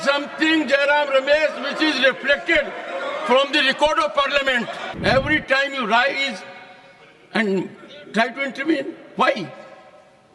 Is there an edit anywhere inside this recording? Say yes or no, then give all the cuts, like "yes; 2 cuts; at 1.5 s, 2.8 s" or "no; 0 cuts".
yes; 1 cut; at 4.8 s